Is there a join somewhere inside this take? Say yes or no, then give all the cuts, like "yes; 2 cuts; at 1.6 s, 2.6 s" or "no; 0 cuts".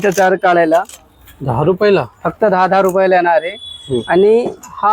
no; 0 cuts